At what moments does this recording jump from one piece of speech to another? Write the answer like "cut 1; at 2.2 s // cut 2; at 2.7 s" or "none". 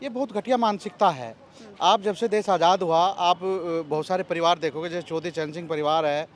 none